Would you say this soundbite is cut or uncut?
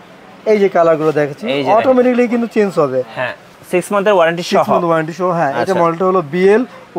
cut